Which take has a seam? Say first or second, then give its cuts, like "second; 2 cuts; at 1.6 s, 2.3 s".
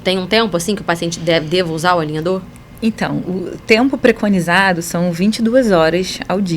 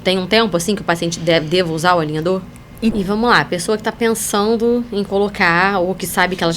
second; 1 cut; at 2.9 s